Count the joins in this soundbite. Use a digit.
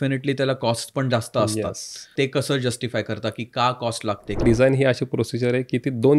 2